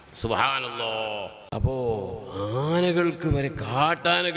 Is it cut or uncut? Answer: cut